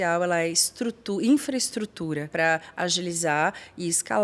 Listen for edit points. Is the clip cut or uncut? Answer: cut